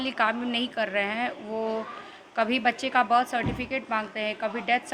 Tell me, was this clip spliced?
no; 0 cuts

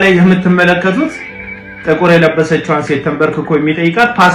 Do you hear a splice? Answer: no; 0 cuts

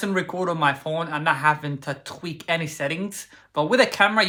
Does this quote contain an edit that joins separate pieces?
no; 0 cuts

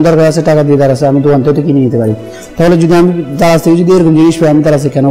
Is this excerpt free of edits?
yes; 0 cuts

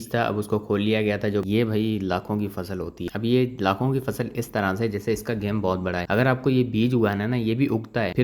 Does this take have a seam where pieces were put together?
yes; 2 cuts; at 1.4 s, 3.1 s

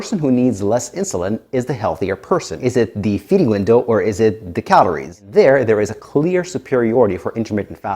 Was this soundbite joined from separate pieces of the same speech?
yes; 2 cuts; at 2.5 s, 5.1 s

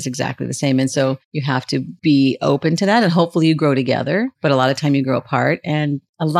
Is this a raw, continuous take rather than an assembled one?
no; 2 cuts; at 1.3 s, 4.3 s

